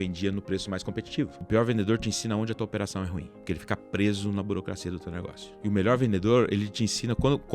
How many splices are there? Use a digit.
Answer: 3